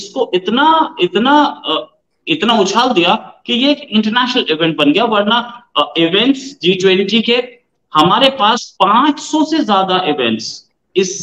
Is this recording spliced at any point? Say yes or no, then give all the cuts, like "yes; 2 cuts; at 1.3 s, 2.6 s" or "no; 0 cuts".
no; 0 cuts